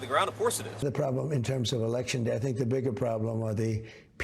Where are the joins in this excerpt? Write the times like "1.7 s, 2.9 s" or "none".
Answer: 0.8 s, 2.4 s